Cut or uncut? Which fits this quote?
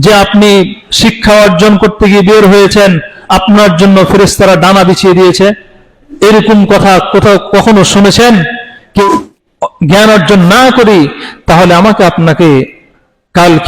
cut